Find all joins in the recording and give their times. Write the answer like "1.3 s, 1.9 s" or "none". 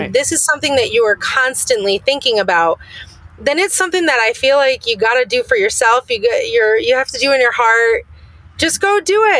none